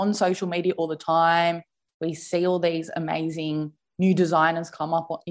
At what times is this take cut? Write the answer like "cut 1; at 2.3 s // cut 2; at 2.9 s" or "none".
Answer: none